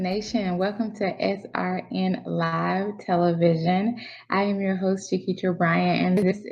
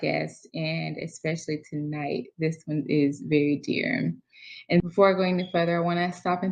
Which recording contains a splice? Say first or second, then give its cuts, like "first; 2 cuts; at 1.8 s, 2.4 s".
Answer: second; 1 cut; at 4.9 s